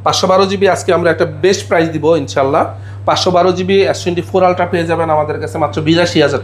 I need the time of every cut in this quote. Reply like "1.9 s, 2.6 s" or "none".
none

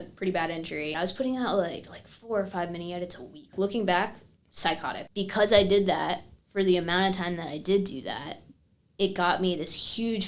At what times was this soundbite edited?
0.9 s, 3.5 s, 5.0 s

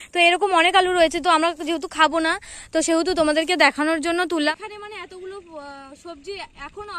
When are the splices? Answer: 4.5 s

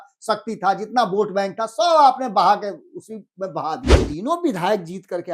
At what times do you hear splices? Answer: 4.0 s

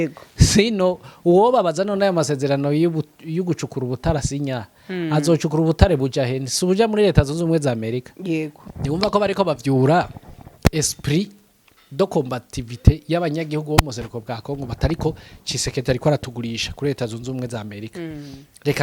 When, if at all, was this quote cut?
8.6 s

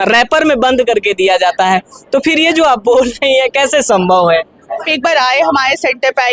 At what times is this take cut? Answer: 4.9 s

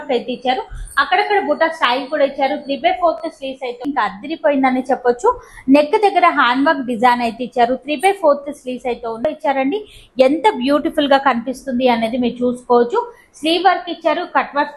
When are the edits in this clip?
3.8 s, 9.2 s

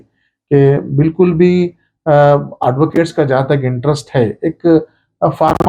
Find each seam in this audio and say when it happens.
none

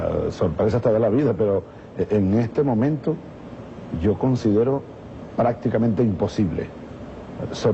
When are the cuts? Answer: none

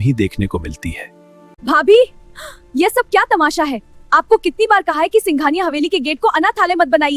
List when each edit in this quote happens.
1.3 s

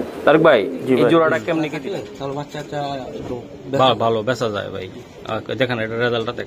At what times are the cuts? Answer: 1.7 s

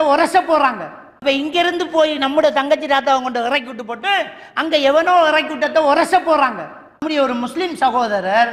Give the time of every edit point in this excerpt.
1.2 s, 7.0 s

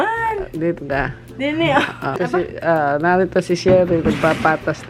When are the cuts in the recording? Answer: 2.2 s

